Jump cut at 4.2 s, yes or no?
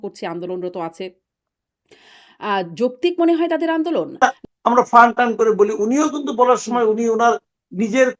yes